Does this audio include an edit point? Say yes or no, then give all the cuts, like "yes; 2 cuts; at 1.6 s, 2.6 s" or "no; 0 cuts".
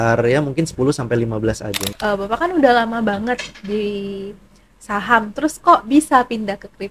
yes; 1 cut; at 1.8 s